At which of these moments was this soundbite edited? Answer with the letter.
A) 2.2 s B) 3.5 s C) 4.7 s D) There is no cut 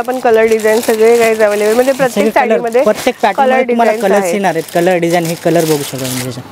D